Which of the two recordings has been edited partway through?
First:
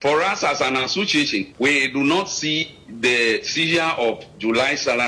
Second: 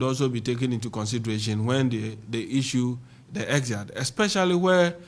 first; 1 cut; at 1.5 s

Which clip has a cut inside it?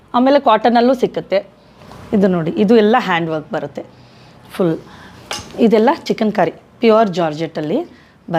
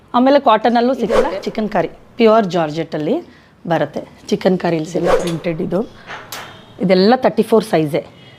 second; 2 cuts; at 1.4 s, 5.2 s

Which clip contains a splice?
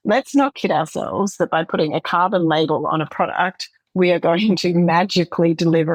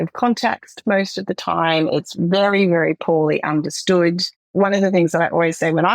second; 1 cut; at 4.4 s

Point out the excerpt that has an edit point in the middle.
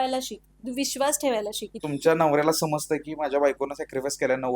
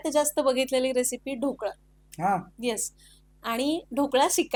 first; 1 cut; at 1.8 s

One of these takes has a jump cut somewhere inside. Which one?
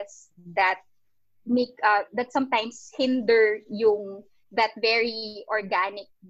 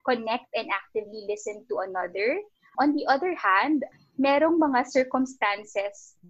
second; 2 cuts; at 2.7 s, 3.9 s

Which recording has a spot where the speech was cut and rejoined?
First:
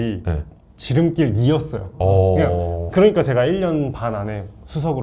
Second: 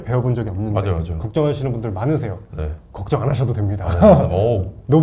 first; 1 cut; at 2.8 s

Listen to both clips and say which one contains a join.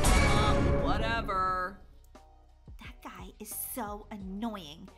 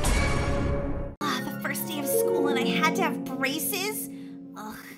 second; 1 cut; at 1.2 s

